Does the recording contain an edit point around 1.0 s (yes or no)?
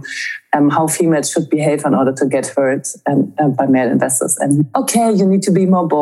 no